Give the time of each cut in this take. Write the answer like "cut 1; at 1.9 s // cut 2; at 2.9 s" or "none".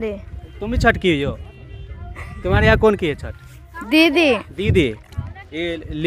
none